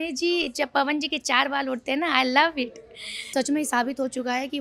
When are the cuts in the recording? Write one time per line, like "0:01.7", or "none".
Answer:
0:03.3